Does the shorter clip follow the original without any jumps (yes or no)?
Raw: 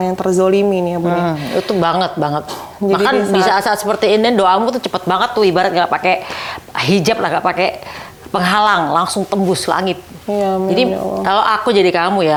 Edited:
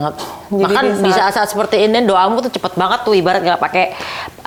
yes